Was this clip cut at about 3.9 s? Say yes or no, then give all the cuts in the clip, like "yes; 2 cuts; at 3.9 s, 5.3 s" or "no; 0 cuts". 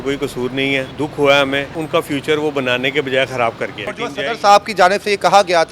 yes; 3 cuts; at 0.9 s, 1.7 s, 3.9 s